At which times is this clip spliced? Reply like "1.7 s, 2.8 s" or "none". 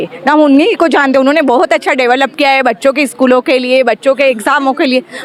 none